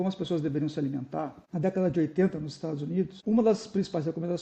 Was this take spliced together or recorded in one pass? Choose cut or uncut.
cut